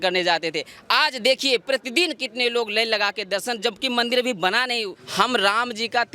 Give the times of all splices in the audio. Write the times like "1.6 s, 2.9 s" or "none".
5.0 s